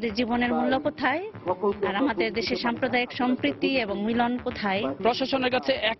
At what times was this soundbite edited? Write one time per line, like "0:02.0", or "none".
0:04.9